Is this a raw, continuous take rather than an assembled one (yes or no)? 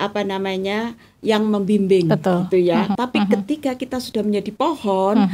no